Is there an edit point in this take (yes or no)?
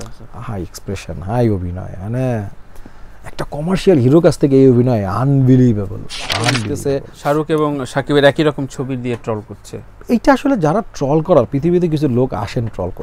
yes